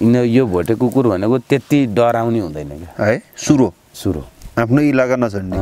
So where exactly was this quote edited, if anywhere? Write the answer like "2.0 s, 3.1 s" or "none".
4.3 s